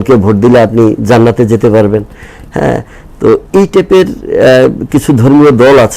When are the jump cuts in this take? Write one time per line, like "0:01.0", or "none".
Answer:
none